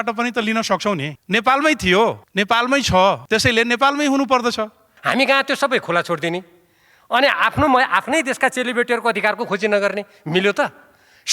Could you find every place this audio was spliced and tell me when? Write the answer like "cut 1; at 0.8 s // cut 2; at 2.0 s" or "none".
cut 1; at 1.1 s // cut 2; at 2.2 s // cut 3; at 3.2 s // cut 4; at 4.9 s